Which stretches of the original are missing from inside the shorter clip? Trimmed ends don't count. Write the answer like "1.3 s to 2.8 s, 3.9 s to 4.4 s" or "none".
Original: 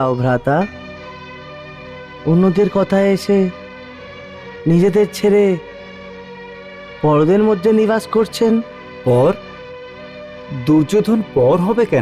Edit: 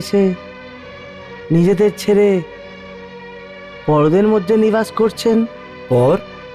none

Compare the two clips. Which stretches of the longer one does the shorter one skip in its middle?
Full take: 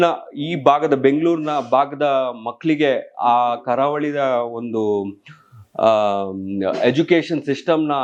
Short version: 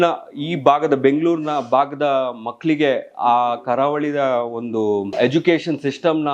5.1 s to 6.8 s

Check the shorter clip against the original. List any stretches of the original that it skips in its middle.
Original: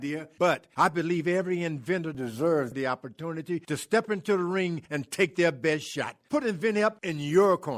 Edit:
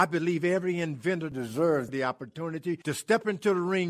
none

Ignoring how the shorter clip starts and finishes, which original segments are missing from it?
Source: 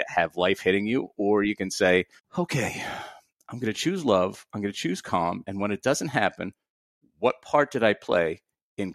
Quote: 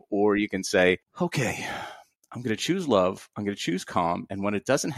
2.1 s to 2.2 s

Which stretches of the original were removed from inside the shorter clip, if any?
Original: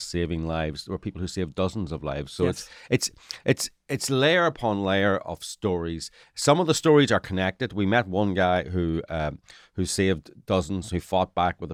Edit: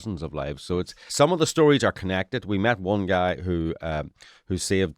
2.7 s to 6.3 s

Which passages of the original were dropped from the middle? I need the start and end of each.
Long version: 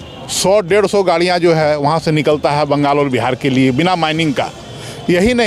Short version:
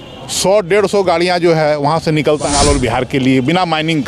2.5 s to 2.8 s

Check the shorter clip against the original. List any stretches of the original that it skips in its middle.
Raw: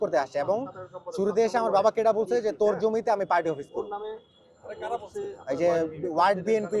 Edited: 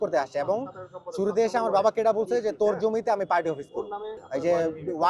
4.2 s to 5.4 s

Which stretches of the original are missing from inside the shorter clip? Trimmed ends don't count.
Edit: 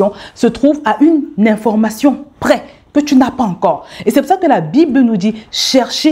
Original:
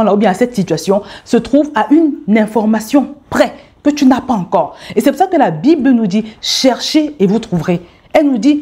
none

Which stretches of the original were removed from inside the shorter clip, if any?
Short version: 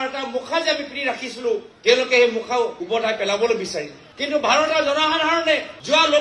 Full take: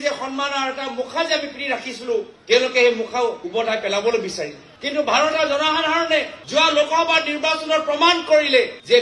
none

